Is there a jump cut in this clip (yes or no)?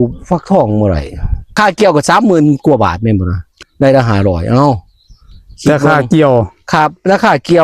yes